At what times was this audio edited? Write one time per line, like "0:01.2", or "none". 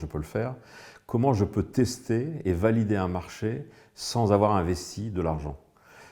none